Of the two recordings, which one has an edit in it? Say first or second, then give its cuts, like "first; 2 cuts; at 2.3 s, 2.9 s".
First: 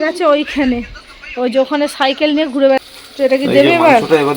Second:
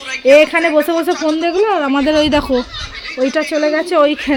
first; 1 cut; at 2.8 s